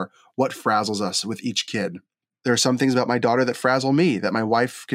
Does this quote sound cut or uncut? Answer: cut